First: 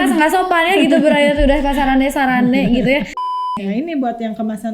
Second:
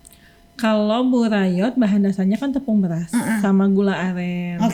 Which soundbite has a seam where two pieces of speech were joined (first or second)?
first